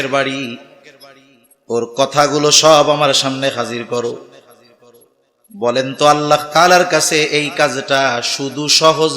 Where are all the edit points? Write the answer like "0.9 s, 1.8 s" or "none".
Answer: none

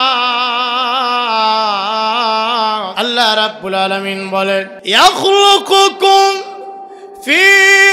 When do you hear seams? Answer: 2.9 s, 4.8 s

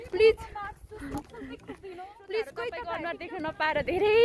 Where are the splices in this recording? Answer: 3.2 s

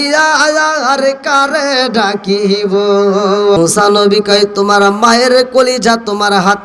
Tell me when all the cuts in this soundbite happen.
3.6 s

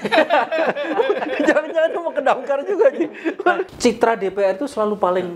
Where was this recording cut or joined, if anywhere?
3.7 s

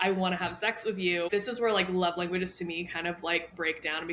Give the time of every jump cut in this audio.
1.3 s

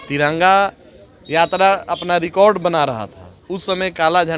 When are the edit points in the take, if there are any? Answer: none

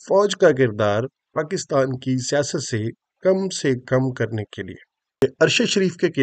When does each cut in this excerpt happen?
5.2 s

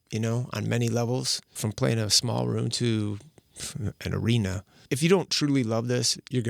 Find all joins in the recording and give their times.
1.6 s, 4.8 s

